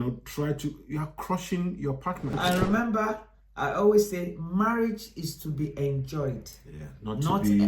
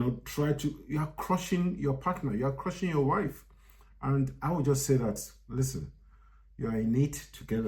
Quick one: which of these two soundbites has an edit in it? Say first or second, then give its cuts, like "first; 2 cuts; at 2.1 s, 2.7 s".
first; 1 cut; at 2.3 s